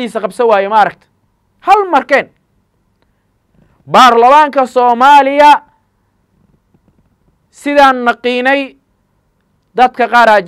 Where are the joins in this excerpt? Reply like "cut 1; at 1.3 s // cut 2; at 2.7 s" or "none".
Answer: none